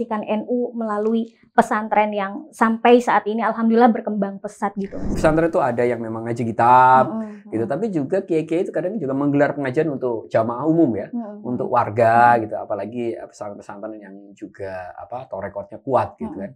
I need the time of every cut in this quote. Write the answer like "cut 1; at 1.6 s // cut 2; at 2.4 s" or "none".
cut 1; at 5.0 s